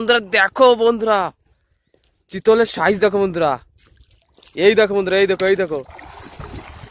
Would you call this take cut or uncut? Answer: uncut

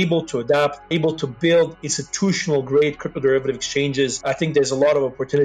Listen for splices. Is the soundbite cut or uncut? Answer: cut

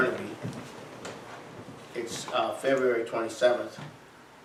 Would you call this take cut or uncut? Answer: uncut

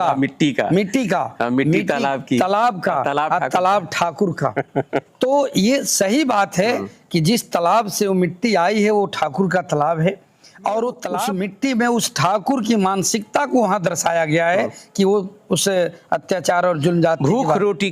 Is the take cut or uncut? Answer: cut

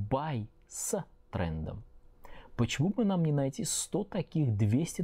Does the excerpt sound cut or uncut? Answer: uncut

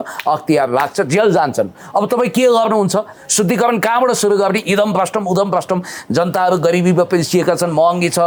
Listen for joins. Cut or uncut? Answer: uncut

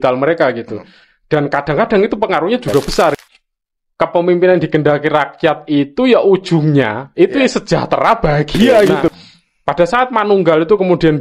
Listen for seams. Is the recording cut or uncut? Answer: cut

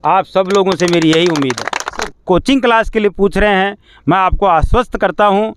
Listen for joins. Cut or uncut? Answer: cut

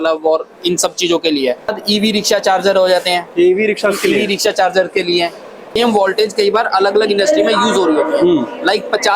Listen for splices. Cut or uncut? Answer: cut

